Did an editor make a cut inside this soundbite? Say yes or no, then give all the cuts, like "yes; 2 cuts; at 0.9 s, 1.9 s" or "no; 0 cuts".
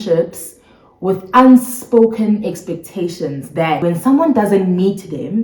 yes; 1 cut; at 3.8 s